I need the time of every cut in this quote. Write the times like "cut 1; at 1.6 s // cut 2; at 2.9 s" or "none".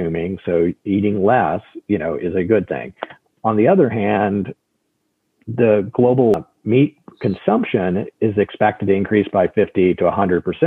cut 1; at 6.3 s